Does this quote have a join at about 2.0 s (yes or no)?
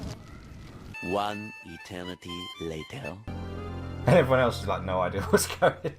no